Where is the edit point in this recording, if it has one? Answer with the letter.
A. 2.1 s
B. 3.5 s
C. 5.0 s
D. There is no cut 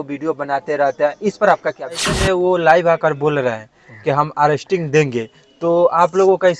A